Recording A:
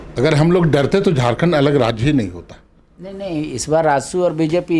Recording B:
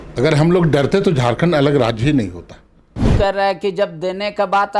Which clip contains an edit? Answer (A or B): B